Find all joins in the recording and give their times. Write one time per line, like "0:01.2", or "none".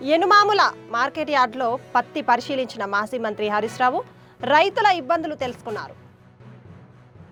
none

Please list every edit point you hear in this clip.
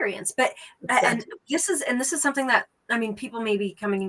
none

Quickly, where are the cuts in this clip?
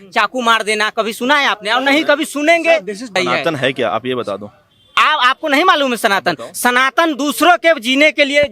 0:03.2

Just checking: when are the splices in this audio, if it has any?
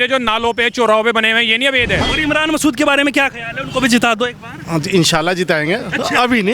0:02.1

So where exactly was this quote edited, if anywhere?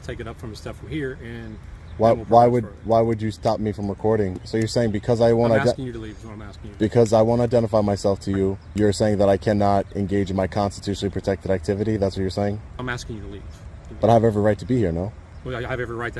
0:04.4
0:08.6
0:12.8
0:13.9
0:15.3

